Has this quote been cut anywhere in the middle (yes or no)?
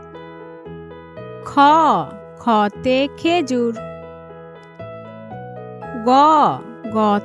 no